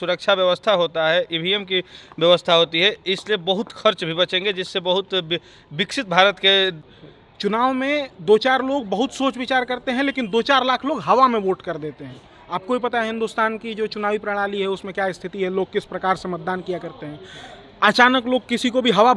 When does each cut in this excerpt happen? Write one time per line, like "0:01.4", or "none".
0:06.9